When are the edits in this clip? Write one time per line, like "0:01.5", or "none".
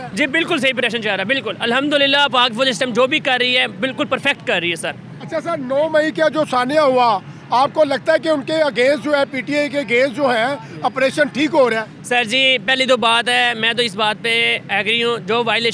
none